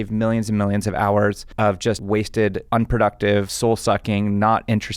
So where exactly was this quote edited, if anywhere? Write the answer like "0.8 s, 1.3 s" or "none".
2.0 s, 3.5 s